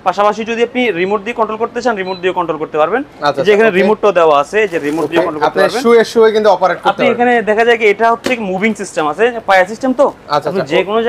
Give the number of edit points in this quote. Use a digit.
0